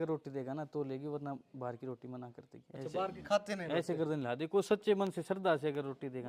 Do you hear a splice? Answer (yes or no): no